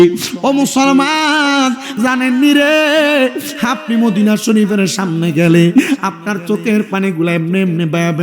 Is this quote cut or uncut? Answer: cut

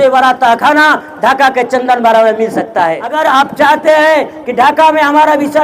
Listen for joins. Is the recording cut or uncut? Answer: cut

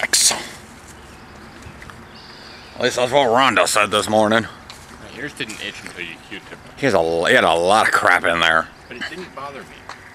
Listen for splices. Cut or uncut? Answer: cut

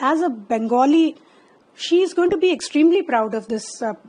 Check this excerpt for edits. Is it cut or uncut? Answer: uncut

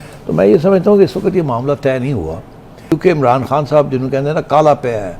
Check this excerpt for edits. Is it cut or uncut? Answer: cut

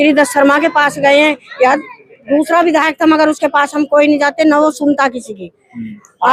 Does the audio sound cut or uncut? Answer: uncut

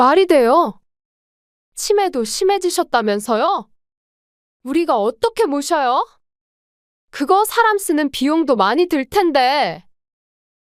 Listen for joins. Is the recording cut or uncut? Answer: uncut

